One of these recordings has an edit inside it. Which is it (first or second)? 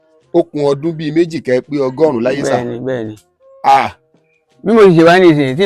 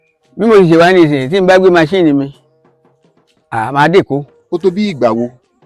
second